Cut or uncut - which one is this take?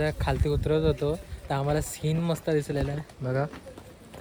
uncut